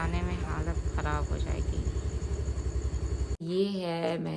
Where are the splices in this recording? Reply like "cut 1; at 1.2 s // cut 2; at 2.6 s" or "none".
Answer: cut 1; at 3.4 s